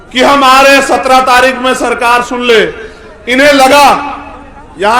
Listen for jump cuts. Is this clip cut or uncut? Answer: uncut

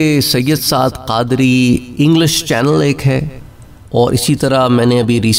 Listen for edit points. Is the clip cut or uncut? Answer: uncut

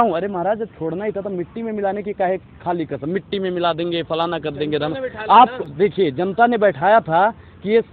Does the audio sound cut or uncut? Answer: uncut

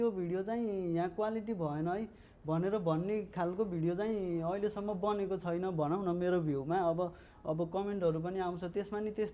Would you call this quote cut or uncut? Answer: uncut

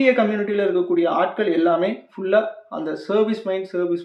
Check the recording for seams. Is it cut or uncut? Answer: uncut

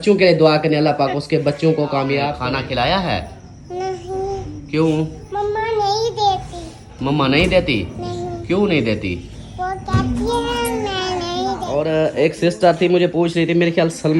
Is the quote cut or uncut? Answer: cut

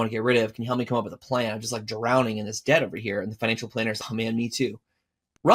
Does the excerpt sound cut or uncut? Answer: cut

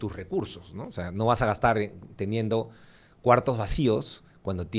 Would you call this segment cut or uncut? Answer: uncut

